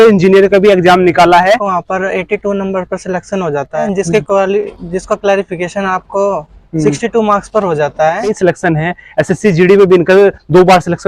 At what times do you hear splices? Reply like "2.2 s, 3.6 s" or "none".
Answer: 1.6 s, 3.8 s, 8.3 s